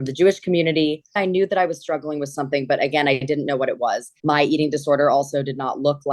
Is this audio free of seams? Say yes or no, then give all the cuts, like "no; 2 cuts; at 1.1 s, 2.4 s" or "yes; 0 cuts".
no; 1 cut; at 1.2 s